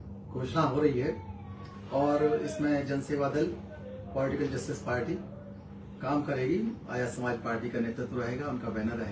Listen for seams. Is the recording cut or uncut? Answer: uncut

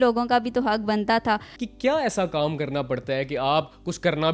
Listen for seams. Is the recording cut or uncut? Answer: cut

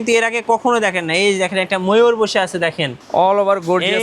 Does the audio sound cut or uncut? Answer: cut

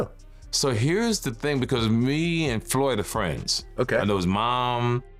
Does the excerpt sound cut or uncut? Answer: uncut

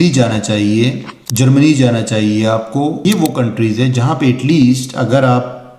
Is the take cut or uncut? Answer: cut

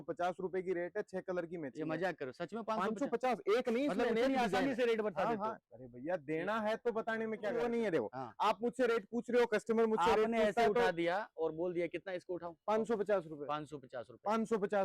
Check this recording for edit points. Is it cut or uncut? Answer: cut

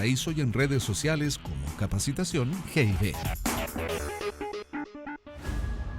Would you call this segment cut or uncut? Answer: cut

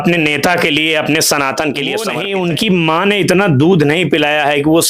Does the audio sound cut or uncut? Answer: cut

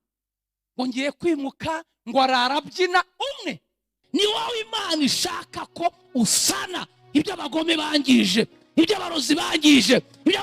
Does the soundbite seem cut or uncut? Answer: cut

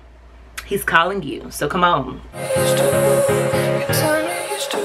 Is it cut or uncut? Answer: cut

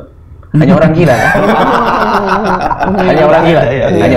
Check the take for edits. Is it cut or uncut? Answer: uncut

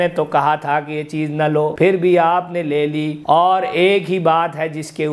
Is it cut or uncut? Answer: cut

